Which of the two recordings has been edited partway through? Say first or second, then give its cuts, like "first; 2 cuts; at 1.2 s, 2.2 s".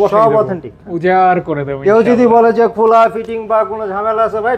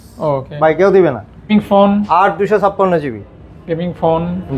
second; 1 cut; at 1.5 s